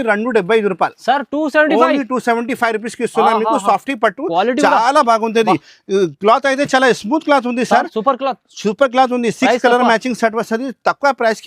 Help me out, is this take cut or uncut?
uncut